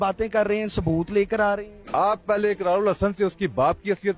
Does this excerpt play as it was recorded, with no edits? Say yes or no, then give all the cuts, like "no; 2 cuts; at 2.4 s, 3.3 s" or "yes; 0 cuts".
no; 1 cut; at 1.8 s